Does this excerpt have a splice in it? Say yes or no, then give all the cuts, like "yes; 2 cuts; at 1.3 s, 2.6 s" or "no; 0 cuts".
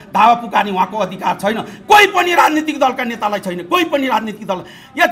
no; 0 cuts